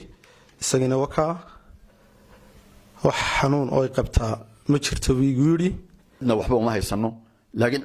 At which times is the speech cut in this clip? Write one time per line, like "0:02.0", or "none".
0:06.2